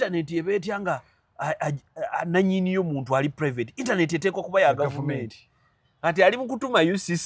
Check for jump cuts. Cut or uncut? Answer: uncut